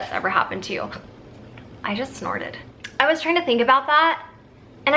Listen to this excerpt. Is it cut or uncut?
uncut